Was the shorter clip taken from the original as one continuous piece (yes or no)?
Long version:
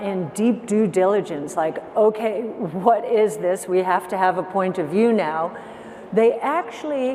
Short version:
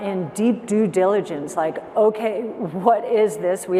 yes